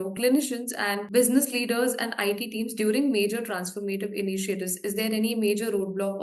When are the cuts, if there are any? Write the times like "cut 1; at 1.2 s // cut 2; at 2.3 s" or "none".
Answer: none